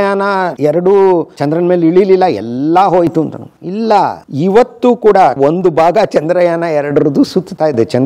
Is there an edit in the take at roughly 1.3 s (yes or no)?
no